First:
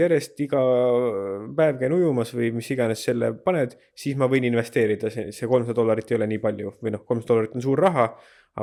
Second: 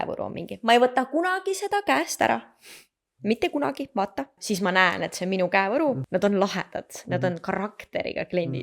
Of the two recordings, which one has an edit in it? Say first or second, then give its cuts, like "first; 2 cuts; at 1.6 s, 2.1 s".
second; 2 cuts; at 4.4 s, 6.0 s